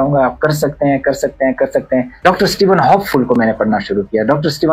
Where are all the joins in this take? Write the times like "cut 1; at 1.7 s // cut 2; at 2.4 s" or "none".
cut 1; at 2.2 s